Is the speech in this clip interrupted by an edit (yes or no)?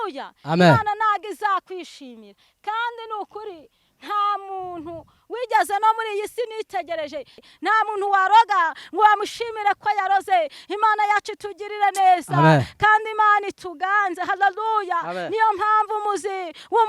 yes